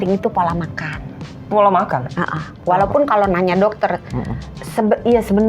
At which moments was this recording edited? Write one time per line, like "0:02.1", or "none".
none